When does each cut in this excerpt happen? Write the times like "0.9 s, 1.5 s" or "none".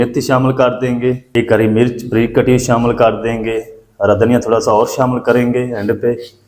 1.2 s